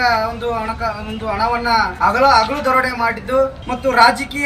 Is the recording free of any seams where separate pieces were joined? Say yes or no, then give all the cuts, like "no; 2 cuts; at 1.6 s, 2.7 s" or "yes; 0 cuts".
no; 2 cuts; at 1.9 s, 3.6 s